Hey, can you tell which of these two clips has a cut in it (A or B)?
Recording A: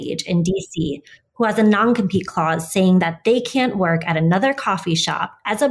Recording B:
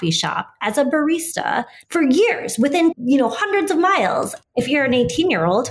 B